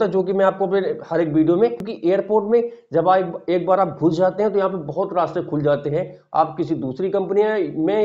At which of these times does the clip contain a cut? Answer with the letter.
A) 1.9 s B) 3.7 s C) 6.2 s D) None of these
A